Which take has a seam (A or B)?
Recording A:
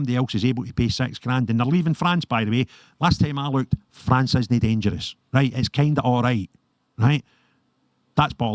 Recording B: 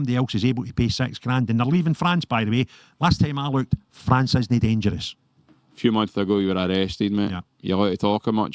B